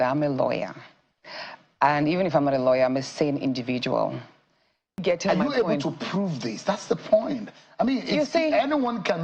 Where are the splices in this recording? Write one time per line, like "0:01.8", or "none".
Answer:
0:05.0